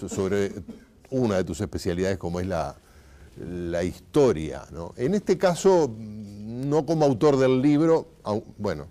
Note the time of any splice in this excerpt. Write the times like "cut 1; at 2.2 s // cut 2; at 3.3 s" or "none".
cut 1; at 7.2 s